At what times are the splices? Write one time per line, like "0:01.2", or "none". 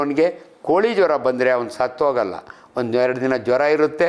none